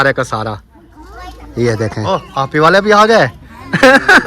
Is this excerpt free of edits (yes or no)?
no